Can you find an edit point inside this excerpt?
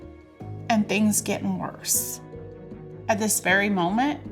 no; 0 cuts

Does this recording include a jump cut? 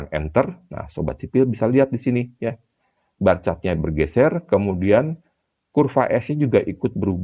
no; 0 cuts

